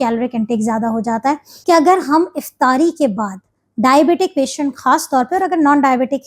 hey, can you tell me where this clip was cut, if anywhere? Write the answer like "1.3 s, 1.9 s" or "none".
1.5 s